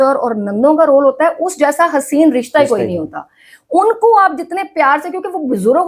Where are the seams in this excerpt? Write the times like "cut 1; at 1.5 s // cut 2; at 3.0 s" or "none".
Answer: none